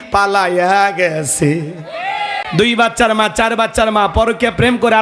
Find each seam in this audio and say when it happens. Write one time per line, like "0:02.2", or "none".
0:02.5